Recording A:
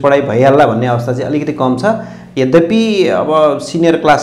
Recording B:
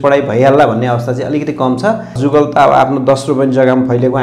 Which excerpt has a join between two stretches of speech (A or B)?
B